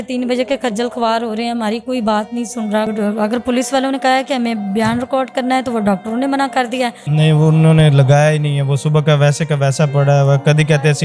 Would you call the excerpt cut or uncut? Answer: cut